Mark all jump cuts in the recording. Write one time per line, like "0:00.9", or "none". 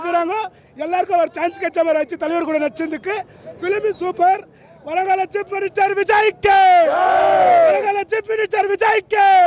none